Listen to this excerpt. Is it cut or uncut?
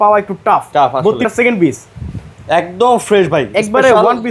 cut